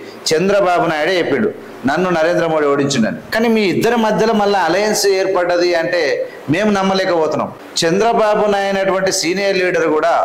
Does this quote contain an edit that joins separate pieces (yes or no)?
yes